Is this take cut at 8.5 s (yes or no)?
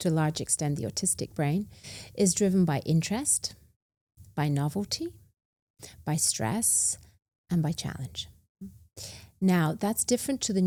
no